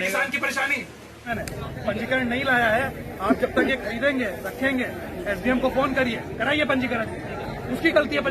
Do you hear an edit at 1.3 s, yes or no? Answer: yes